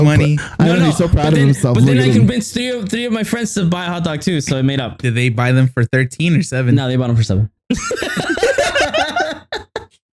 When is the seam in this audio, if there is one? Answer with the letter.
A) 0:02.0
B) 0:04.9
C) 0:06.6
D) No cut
B